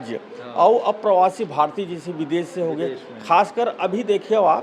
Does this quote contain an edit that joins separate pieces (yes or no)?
no